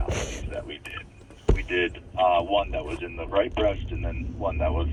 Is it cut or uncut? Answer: uncut